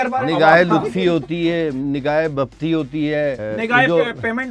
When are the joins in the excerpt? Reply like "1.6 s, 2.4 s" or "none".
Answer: 3.4 s